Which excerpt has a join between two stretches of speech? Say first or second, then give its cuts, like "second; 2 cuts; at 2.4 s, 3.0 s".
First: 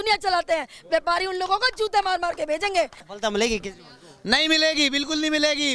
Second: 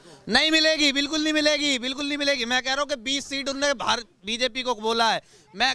first; 1 cut; at 3.0 s